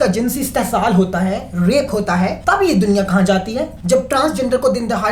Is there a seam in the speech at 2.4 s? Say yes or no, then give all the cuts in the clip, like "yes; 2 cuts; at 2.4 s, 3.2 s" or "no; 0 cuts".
yes; 2 cuts; at 2.4 s, 3.7 s